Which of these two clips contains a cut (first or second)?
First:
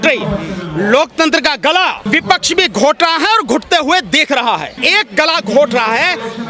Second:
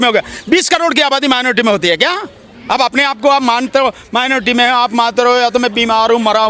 first